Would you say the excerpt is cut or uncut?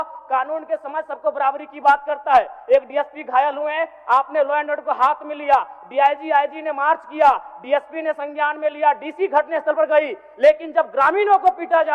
uncut